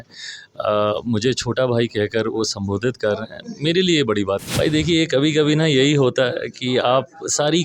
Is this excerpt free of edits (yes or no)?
no